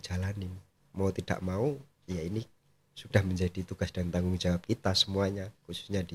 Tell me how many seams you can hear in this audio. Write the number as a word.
zero